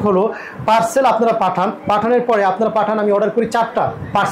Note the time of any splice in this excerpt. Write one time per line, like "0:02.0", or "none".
none